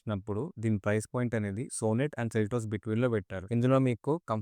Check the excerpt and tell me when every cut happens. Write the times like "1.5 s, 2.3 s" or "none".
3.4 s